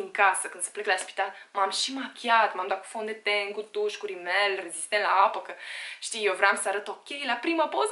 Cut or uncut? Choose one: uncut